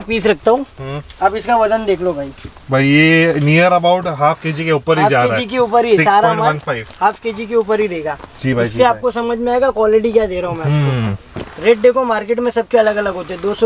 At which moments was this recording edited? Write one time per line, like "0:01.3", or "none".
none

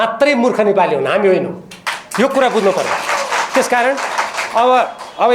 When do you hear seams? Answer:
none

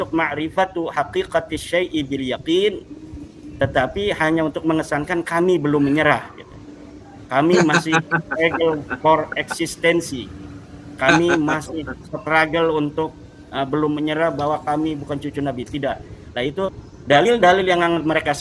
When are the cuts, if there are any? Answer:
0:16.7

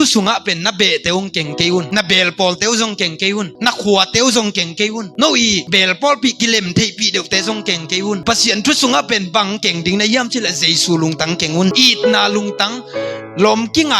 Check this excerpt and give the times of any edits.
0:11.8

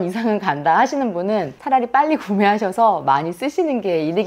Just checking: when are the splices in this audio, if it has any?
0:01.6

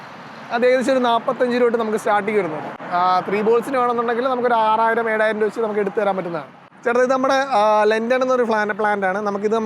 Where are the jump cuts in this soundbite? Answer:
none

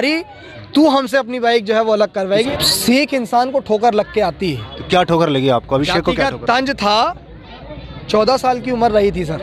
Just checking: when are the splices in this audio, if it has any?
0:02.5

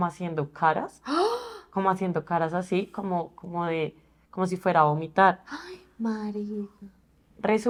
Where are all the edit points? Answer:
none

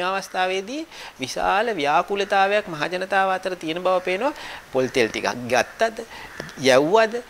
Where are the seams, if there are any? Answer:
none

